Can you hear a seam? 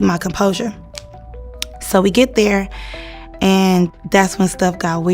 yes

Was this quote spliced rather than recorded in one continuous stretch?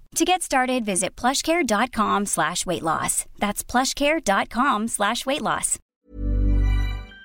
yes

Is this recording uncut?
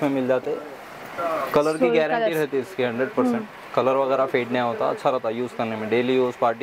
yes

